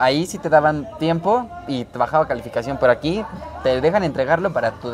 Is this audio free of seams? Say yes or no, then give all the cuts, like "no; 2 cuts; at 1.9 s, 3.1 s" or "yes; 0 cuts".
yes; 0 cuts